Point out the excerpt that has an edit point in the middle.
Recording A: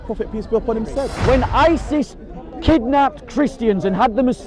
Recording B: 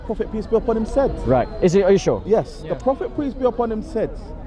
A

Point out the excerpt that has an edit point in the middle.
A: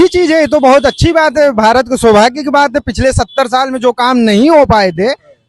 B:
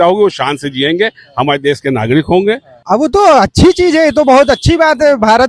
B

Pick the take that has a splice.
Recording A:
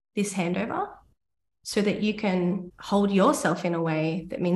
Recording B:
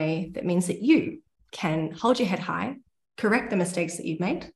A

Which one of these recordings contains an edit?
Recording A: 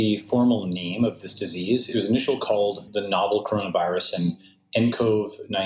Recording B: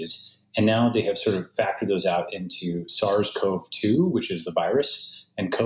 A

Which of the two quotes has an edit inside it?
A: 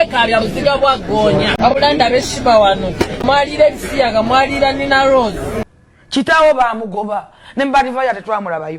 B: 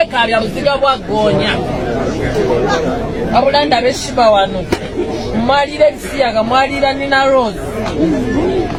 A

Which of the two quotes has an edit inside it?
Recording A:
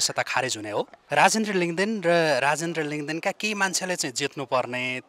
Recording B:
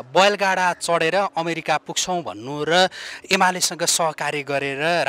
A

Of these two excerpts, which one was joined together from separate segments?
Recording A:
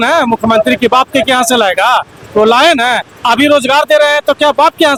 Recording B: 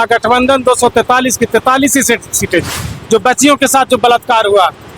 B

